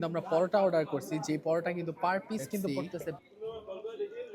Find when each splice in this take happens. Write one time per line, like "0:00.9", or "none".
0:03.2